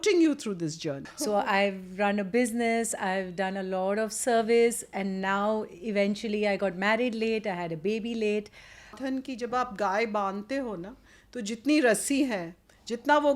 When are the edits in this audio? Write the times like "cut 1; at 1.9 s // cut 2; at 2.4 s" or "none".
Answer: cut 1; at 1.1 s // cut 2; at 9.0 s